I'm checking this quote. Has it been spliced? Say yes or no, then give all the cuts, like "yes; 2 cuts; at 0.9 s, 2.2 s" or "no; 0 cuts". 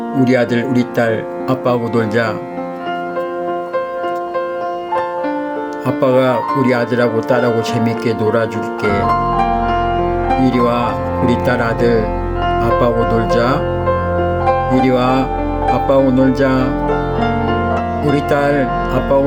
no; 0 cuts